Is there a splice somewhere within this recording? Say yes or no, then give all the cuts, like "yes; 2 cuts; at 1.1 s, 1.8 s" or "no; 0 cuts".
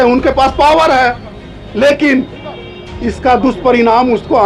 no; 0 cuts